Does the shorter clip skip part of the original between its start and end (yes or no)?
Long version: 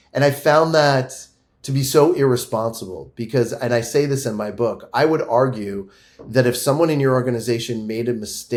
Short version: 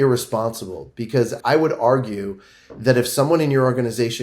yes